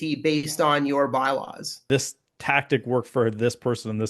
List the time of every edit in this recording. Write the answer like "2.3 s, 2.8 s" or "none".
1.8 s